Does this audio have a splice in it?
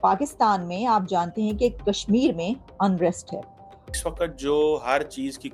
yes; 1 cut; at 4.0 s

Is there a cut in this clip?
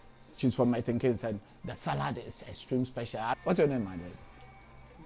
yes; 1 cut; at 3.3 s

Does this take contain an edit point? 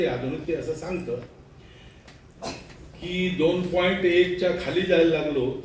no; 0 cuts

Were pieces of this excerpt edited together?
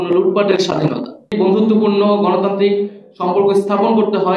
yes; 1 cut; at 1.3 s

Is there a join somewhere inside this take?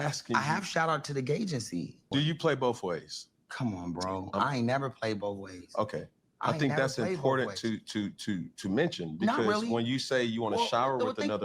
yes; 1 cut; at 2.1 s

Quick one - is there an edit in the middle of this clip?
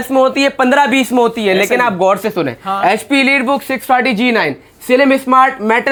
no; 0 cuts

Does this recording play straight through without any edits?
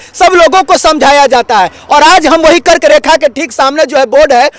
yes; 0 cuts

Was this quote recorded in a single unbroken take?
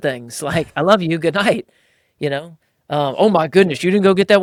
yes; 0 cuts

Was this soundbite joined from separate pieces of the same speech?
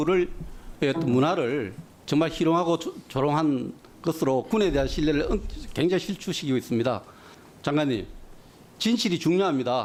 no; 0 cuts

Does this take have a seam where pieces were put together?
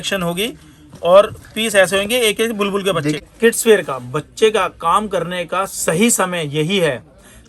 yes; 1 cut; at 3.2 s

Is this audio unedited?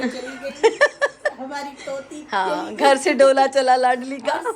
yes; 0 cuts

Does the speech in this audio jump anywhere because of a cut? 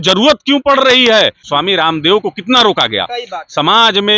yes; 1 cut; at 1.4 s

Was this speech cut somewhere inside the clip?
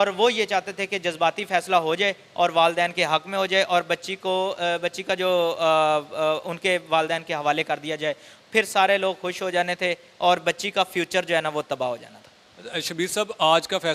no; 0 cuts

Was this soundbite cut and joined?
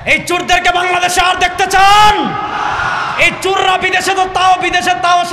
no; 0 cuts

